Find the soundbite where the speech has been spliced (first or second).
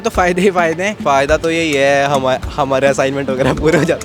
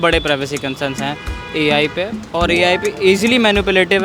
first